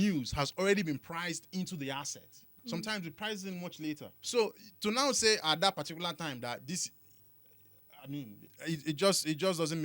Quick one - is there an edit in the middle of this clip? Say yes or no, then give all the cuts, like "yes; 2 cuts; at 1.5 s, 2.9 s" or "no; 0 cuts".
yes; 3 cuts; at 2.5 s, 4.1 s, 8.5 s